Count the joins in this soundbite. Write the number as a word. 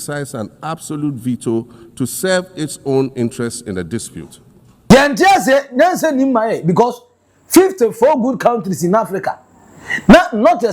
one